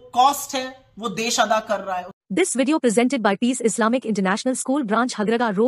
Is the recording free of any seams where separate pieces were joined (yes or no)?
no